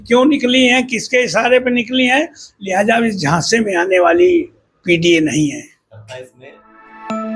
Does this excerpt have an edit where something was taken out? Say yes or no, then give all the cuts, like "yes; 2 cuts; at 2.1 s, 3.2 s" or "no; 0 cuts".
yes; 1 cut; at 6.4 s